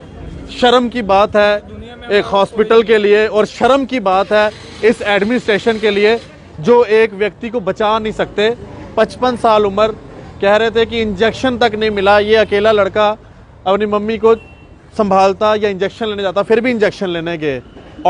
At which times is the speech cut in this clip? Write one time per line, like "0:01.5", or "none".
none